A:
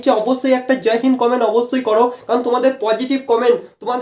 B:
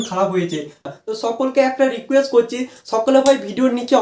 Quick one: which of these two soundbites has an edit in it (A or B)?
B